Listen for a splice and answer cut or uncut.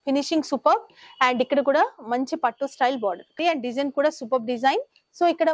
cut